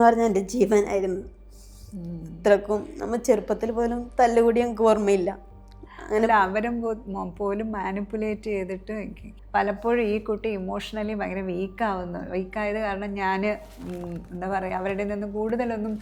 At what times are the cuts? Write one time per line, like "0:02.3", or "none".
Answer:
none